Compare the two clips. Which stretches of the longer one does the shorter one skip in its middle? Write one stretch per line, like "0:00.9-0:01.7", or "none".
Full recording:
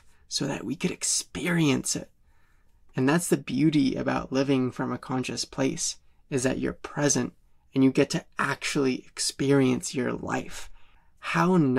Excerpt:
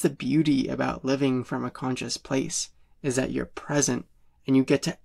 none